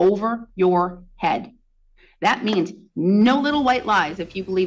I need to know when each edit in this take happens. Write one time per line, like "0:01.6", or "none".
none

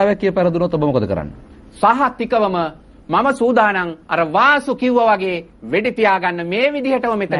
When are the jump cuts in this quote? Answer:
none

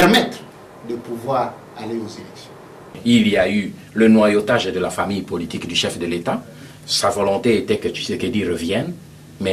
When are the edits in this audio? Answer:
0:02.9

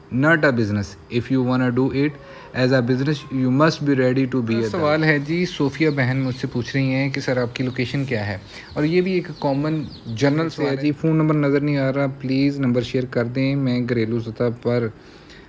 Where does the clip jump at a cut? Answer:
0:04.7
0:10.6

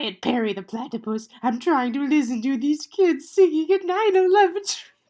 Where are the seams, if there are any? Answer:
none

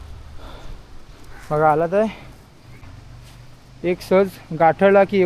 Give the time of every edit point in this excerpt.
0:02.8

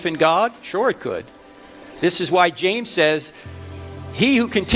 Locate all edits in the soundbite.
none

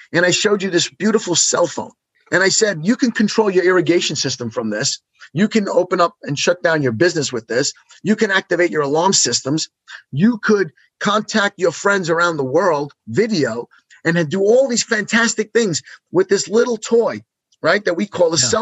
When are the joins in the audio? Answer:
0:02.2

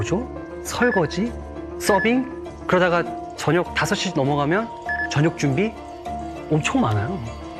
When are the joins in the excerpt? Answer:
none

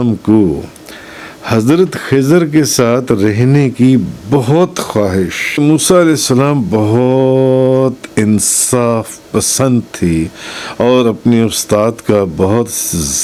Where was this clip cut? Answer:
0:05.6

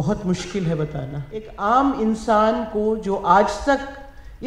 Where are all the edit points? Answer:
0:01.4

